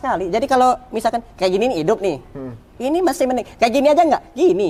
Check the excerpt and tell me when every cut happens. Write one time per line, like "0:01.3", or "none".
none